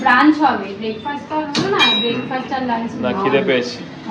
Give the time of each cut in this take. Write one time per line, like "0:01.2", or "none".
none